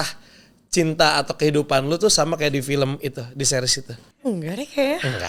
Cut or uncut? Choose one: uncut